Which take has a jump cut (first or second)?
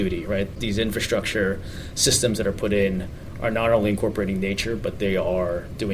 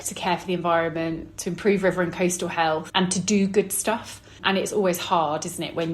second